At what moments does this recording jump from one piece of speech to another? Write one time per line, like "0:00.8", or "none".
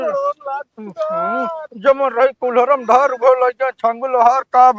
none

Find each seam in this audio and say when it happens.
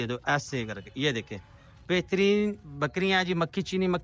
none

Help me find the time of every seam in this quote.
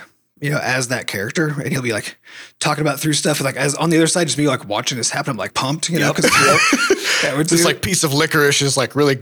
0:05.5

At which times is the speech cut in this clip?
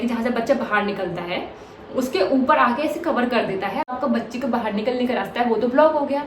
0:03.9

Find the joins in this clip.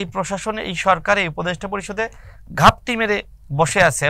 none

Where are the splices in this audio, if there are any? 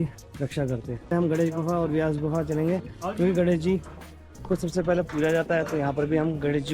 0:01.1

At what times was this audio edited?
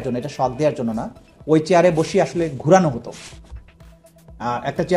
none

